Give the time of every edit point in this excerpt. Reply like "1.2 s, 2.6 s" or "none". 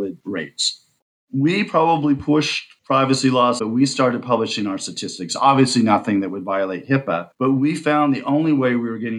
1.1 s